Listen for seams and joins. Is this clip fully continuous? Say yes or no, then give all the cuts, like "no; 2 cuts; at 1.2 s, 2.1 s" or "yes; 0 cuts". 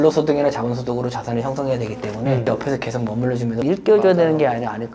no; 1 cut; at 3.6 s